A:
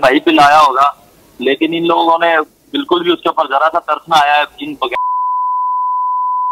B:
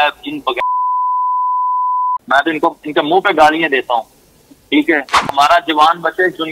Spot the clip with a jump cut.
B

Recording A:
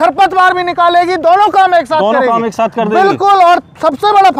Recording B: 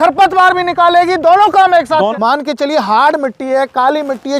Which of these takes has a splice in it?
B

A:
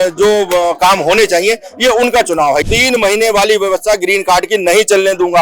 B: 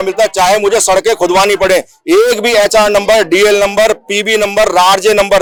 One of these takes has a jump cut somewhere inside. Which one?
A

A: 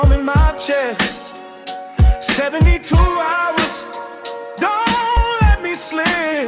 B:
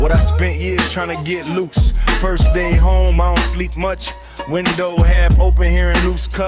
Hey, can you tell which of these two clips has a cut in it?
A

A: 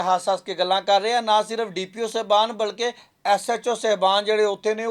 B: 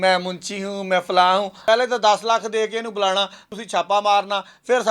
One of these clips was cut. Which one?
B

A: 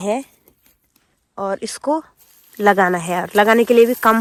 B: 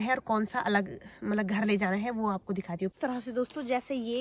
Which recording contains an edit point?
B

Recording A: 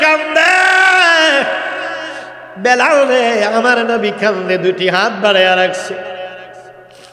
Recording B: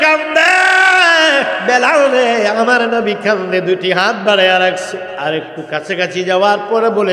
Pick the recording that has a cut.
B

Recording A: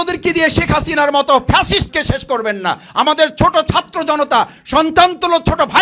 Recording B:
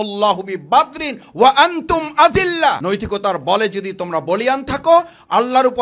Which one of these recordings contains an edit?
B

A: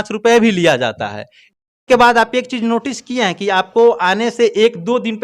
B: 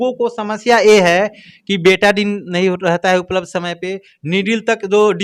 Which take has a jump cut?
A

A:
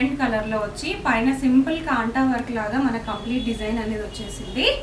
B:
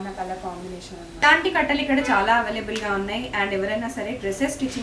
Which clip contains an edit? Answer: B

